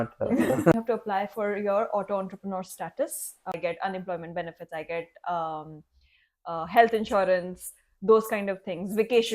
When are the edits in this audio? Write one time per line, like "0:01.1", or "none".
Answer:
0:00.8
0:03.5